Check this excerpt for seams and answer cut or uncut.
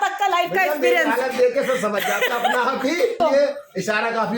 cut